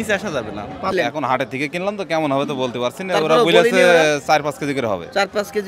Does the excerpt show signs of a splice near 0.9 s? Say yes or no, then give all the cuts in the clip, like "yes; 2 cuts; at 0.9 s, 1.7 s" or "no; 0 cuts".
yes; 1 cut; at 0.9 s